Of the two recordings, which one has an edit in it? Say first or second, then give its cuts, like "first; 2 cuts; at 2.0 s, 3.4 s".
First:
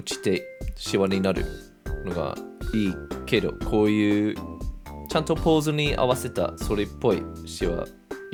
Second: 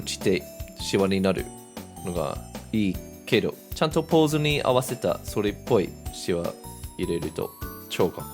second; 1 cut; at 3.6 s